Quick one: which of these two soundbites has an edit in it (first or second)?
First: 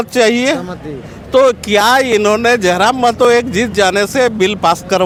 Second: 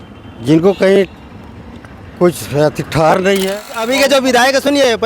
second